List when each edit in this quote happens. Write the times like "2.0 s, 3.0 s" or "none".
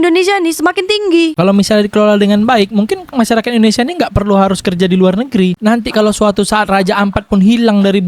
1.3 s, 5.5 s